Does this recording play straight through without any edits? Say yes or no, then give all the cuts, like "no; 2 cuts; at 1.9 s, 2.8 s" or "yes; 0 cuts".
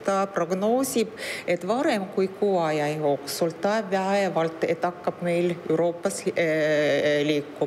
yes; 0 cuts